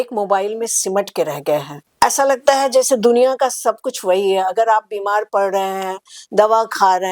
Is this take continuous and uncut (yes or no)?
no